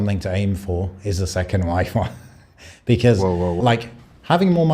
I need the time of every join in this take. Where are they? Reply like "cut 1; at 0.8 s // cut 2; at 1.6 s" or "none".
cut 1; at 3.6 s